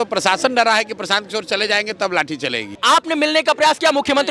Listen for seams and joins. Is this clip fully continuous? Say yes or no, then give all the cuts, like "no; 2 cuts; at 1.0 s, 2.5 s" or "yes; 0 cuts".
no; 1 cut; at 2.8 s